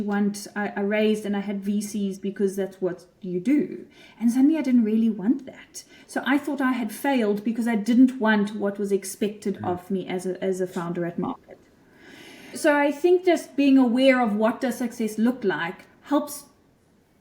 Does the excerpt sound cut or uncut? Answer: cut